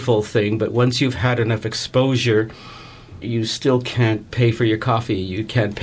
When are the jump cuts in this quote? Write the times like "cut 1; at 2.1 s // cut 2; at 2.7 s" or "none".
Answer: cut 1; at 4.3 s